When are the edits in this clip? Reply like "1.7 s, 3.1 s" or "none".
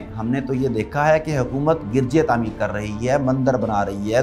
none